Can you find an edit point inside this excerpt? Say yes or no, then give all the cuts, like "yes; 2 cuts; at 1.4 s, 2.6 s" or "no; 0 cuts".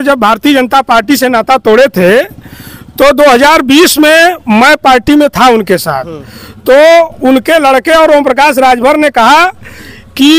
no; 0 cuts